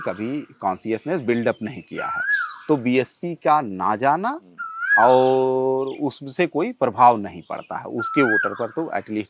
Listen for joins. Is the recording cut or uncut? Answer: uncut